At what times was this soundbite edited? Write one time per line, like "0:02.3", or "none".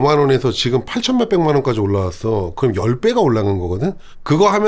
none